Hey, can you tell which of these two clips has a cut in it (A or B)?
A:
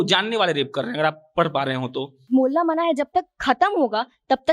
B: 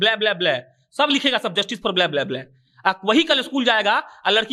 A